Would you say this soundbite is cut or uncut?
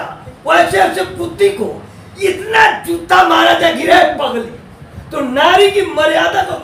uncut